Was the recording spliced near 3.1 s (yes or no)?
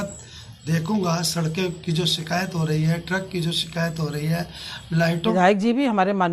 no